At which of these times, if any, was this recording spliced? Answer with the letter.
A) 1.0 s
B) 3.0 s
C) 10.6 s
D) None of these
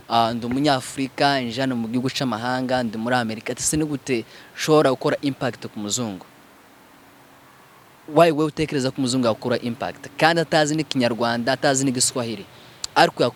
D